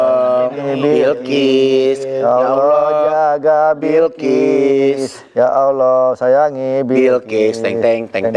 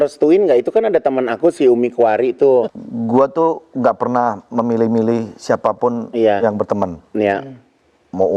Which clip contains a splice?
second; 1 cut; at 2.8 s

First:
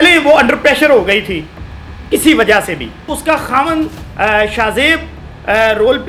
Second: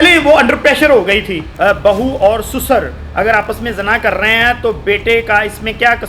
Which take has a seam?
second; 1 cut; at 1.5 s

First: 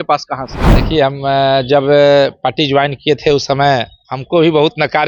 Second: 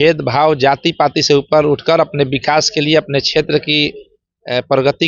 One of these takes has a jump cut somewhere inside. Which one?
first; 1 cut; at 4.1 s

